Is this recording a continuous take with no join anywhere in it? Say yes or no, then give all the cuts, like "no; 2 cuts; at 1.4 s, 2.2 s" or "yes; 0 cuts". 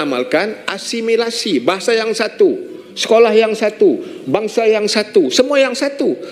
yes; 0 cuts